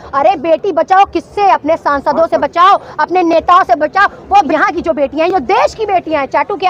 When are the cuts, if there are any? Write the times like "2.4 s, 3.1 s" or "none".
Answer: 4.5 s